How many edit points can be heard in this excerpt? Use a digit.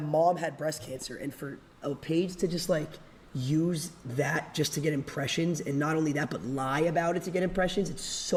0